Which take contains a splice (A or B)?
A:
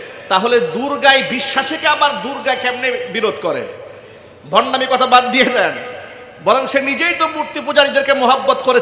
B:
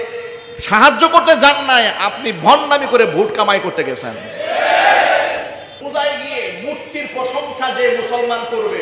B